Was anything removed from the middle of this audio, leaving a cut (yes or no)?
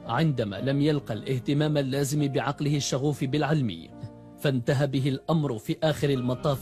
no